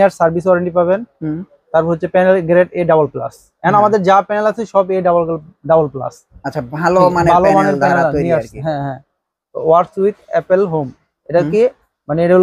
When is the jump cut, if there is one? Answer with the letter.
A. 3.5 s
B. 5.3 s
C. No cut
C